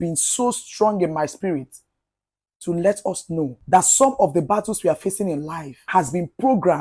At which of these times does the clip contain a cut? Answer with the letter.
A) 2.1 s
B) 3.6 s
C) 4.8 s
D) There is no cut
B